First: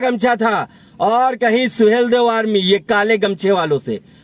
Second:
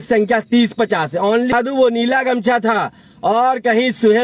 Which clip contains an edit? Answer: second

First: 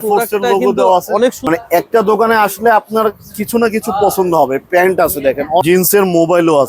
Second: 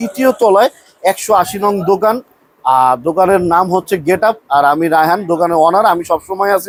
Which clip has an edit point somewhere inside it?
first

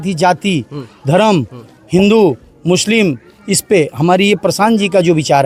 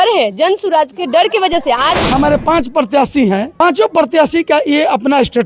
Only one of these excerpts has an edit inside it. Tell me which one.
second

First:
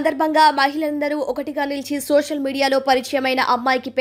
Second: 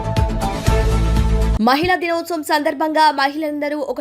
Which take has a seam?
second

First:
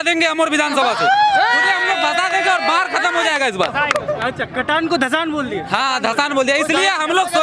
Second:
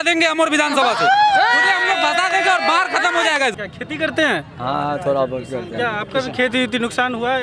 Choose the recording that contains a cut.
second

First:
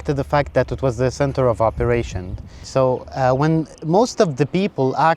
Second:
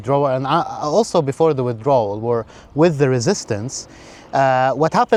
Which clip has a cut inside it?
first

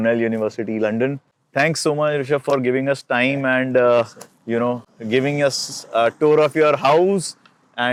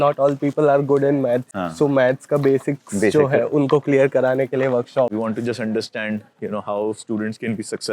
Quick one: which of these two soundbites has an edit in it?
second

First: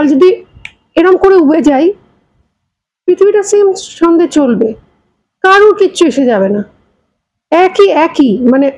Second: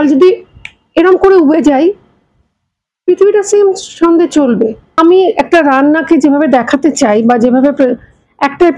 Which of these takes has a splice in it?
second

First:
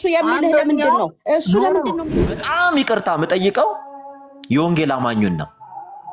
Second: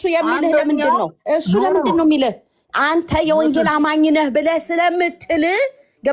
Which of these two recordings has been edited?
first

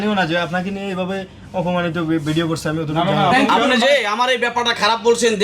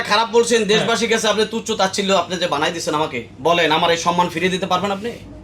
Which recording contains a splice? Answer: first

